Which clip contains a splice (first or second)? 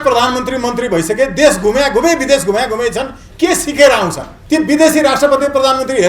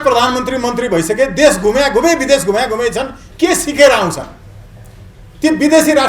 first